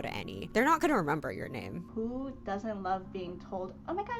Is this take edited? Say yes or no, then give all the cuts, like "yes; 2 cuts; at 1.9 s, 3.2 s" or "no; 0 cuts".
yes; 1 cut; at 1.7 s